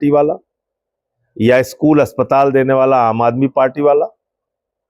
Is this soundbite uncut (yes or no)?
yes